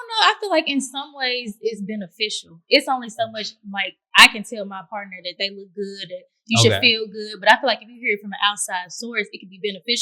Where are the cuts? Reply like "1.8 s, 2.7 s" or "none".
2.5 s